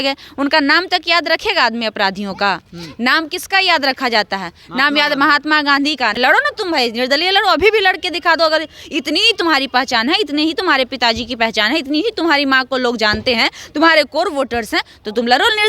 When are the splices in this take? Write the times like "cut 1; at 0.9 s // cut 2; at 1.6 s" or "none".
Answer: cut 1; at 6.1 s